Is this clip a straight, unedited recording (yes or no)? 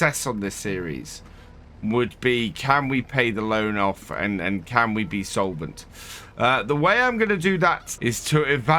no